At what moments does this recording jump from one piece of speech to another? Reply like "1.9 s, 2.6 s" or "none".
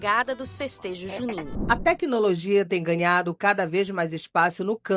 1.4 s